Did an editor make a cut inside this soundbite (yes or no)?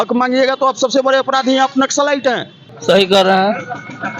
yes